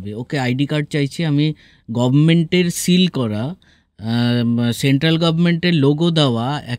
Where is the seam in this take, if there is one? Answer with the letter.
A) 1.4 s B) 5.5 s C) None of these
C